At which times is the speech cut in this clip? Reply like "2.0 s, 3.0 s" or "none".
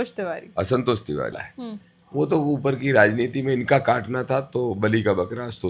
1.4 s